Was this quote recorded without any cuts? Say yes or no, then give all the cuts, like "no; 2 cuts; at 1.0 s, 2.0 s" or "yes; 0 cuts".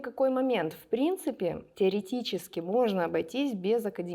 yes; 0 cuts